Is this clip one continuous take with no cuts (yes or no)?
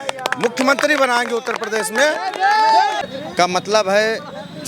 no